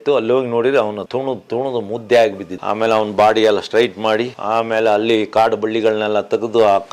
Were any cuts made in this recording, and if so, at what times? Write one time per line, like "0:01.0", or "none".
0:01.0
0:02.5